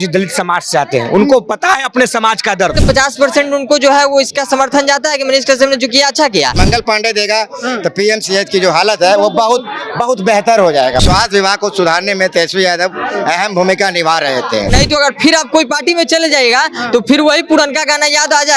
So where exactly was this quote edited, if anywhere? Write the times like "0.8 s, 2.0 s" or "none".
2.8 s, 6.6 s, 11.0 s, 14.7 s